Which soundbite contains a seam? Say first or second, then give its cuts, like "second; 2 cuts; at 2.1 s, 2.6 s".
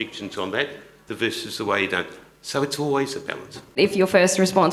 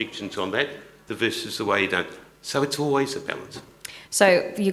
first; 1 cut; at 3.7 s